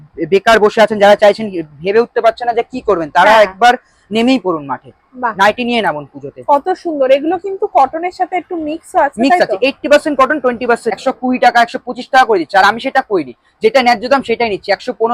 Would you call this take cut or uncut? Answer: cut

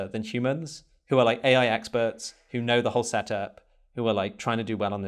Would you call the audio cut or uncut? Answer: uncut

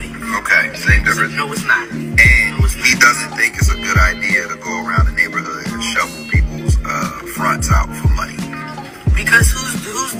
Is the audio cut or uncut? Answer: uncut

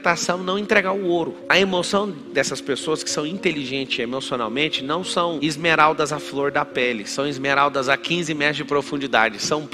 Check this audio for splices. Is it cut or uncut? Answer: uncut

